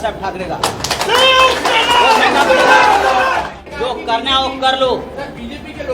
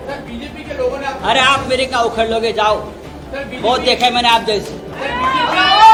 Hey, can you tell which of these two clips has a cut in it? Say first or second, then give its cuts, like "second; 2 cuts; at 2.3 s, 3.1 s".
first; 1 cut; at 3.6 s